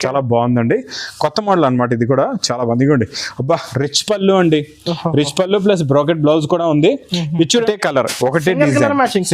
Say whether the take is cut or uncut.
cut